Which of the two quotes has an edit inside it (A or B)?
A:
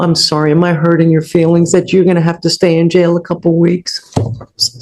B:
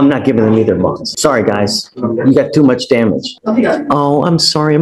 B